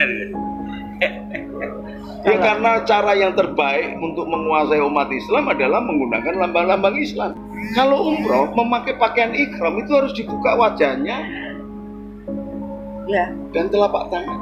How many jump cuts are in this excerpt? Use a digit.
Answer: 1